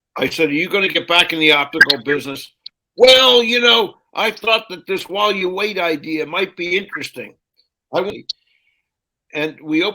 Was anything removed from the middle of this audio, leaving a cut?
yes; 1 cut; at 8.2 s

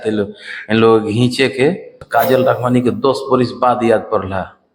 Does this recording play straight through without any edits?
no; 1 cut; at 1.9 s

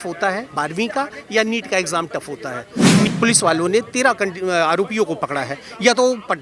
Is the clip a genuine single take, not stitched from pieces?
no; 1 cut; at 3.1 s

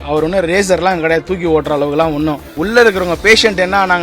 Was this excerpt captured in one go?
no; 1 cut; at 2.5 s

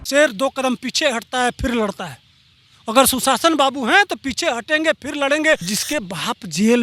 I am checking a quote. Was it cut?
yes; 1 cut; at 5.7 s

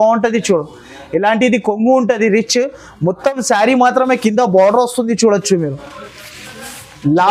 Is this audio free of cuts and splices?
yes; 0 cuts

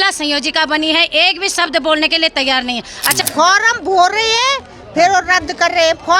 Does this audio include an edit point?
yes; 1 cut; at 3.2 s

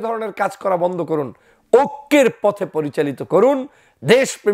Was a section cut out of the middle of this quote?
no; 0 cuts

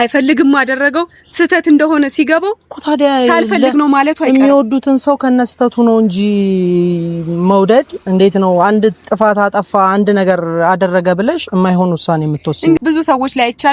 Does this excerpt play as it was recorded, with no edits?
no; 1 cut; at 12.8 s

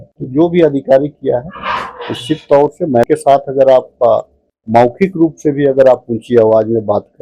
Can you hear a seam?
yes; 1 cut; at 3.1 s

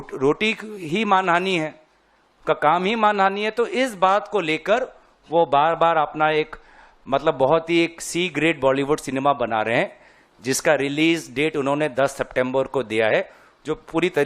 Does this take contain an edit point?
no; 0 cuts

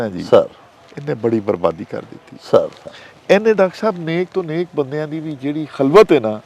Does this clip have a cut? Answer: no; 0 cuts

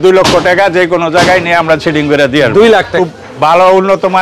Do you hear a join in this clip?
yes; 1 cut; at 2.9 s

